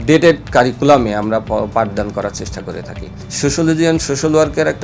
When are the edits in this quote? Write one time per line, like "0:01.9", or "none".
0:03.2

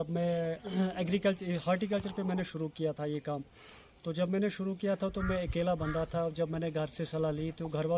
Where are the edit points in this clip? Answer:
none

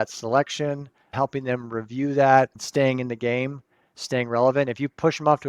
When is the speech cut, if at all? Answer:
0:02.6

